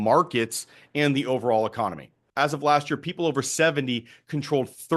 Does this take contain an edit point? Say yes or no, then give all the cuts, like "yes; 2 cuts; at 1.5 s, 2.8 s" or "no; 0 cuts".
yes; 1 cut; at 2.2 s